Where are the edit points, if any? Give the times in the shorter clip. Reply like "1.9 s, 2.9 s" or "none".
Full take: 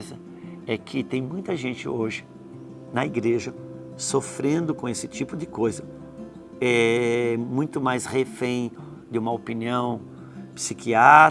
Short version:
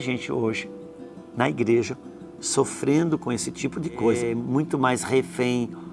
4.2 s